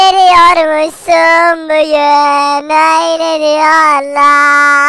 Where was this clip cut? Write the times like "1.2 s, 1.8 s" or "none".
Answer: none